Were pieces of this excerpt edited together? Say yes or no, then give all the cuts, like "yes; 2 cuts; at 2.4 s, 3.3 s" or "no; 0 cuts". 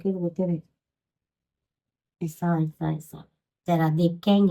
no; 0 cuts